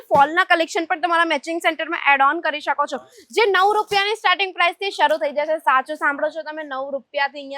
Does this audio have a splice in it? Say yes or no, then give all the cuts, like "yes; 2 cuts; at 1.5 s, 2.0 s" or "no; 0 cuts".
no; 0 cuts